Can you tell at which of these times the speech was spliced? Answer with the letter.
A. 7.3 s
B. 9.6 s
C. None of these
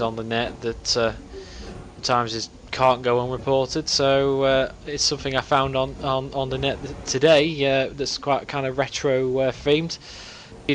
A